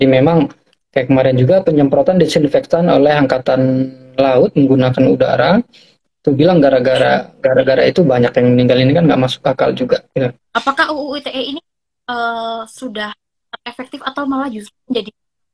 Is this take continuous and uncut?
no; 1 cut; at 10.5 s

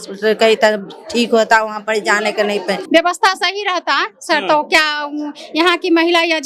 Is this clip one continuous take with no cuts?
no; 1 cut; at 2.8 s

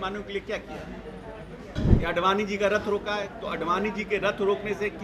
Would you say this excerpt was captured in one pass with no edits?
no; 1 cut; at 1.8 s

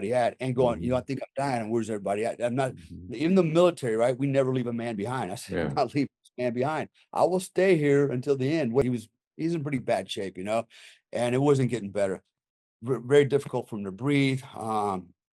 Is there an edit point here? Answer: yes; 1 cut; at 8.8 s

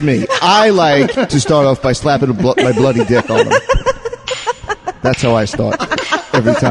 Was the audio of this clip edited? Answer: yes; 1 cut; at 4.2 s

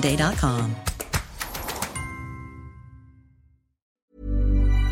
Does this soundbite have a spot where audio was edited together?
yes; 1 cut; at 4.0 s

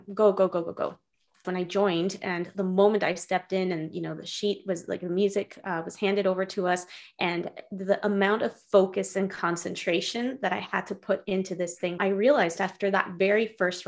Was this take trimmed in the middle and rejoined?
yes; 2 cuts; at 1.4 s, 11.9 s

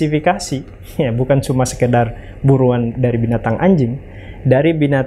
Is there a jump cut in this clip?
no; 0 cuts

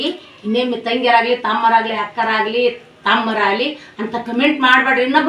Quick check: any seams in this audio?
no; 0 cuts

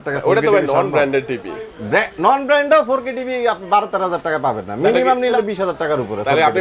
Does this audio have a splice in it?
yes; 1 cut; at 5.3 s

